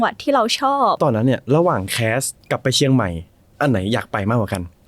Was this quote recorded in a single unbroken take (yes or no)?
no